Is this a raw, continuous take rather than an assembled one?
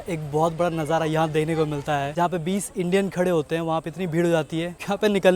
no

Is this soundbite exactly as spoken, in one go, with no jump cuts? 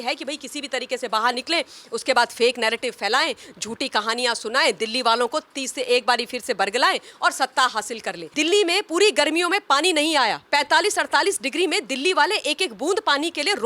no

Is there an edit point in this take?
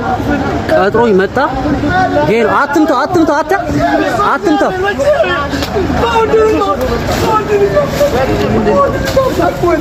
no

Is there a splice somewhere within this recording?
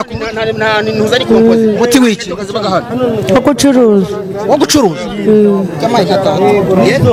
no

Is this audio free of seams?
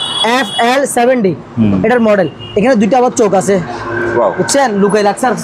yes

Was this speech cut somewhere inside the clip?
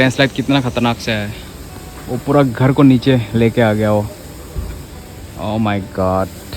no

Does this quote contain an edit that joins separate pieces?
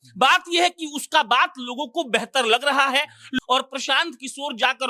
yes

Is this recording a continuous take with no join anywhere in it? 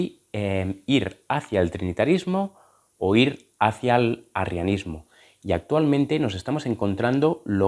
yes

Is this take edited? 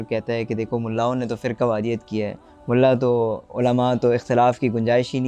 no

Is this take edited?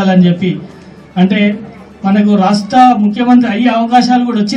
no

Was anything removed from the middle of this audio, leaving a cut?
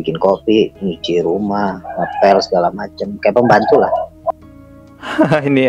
no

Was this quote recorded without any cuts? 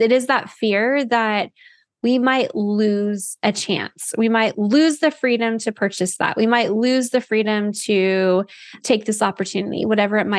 yes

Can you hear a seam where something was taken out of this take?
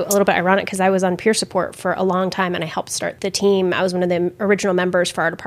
yes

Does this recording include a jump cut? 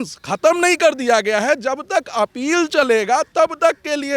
no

